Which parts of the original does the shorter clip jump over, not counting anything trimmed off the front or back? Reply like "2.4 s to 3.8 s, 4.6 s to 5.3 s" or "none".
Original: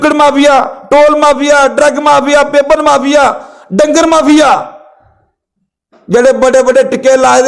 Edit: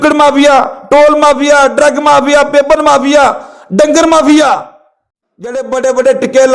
5.6 s to 6.3 s

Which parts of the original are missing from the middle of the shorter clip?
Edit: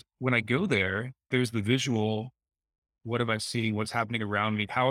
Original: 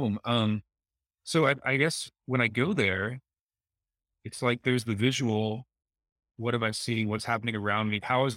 3.3 s to 4.6 s

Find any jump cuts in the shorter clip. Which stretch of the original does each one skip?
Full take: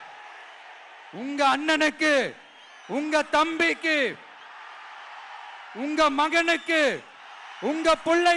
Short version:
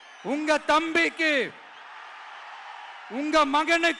none

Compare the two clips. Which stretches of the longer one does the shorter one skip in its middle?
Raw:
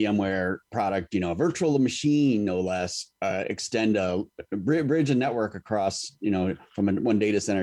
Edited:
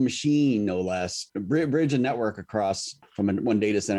3.0 s to 4.4 s, 6.2 s to 6.6 s

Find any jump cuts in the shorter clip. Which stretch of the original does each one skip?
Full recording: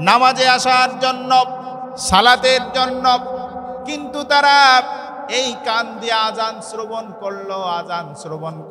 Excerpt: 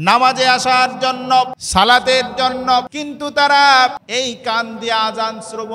1.6 s to 2.0 s, 3.3 s to 3.9 s, 5.0 s to 5.2 s

